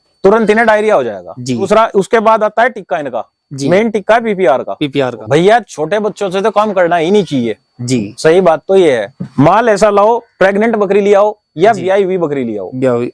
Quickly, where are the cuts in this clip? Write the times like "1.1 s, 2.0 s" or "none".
1.6 s, 5.2 s, 9.3 s